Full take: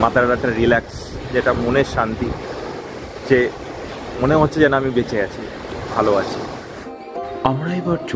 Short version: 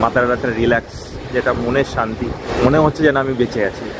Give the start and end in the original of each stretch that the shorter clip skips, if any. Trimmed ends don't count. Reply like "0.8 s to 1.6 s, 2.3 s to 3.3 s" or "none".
2.4 s to 4.0 s